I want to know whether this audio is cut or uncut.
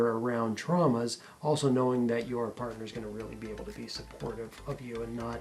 uncut